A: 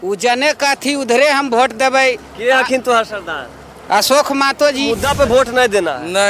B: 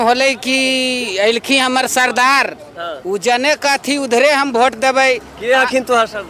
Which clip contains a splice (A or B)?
A